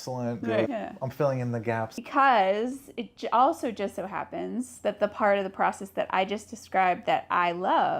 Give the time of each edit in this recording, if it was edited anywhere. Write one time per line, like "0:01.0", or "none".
0:02.0